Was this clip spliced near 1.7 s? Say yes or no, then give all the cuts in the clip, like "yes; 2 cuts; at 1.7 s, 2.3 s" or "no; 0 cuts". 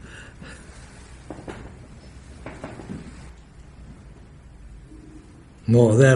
no; 1 cut; at 3.3 s